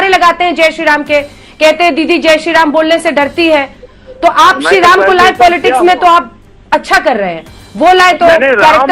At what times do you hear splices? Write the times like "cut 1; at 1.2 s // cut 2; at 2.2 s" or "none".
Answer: none